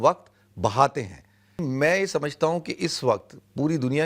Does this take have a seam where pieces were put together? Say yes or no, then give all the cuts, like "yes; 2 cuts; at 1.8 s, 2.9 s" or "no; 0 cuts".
yes; 1 cut; at 1.6 s